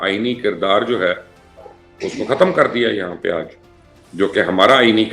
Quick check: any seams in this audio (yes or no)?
no